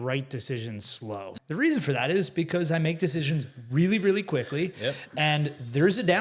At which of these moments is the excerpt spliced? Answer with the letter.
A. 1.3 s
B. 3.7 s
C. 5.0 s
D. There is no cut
A